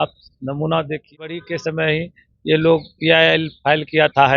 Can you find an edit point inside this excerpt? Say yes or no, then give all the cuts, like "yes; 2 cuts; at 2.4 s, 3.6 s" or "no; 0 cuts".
yes; 1 cut; at 1.4 s